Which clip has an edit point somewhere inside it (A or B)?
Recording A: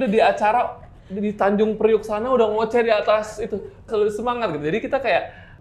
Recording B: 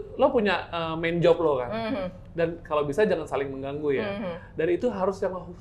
A